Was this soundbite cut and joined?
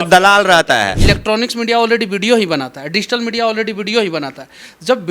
yes; 1 cut; at 0.9 s

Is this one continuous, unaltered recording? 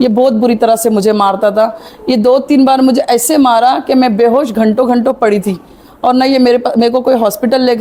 yes; 0 cuts

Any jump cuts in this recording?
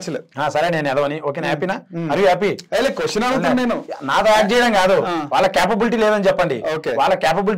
no; 0 cuts

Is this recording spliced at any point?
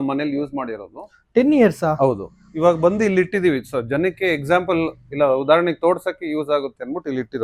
no; 0 cuts

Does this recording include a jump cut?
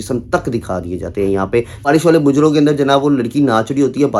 yes; 1 cut; at 1.9 s

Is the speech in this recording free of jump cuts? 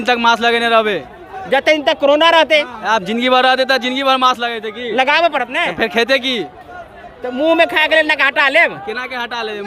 yes; 0 cuts

